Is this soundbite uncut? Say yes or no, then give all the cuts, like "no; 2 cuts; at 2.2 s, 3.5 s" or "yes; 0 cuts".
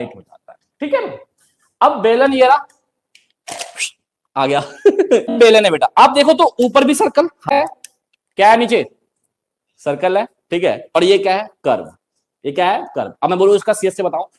no; 2 cuts; at 5.4 s, 7.6 s